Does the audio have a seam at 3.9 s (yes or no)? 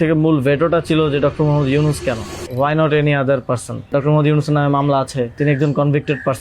yes